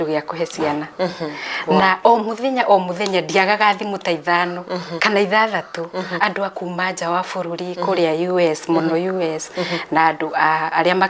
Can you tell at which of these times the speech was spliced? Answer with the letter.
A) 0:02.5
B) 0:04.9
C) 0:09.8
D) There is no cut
B